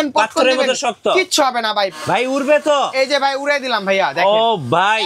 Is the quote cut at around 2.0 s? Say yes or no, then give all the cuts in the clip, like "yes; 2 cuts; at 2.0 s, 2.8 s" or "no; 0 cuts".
yes; 1 cut; at 2.0 s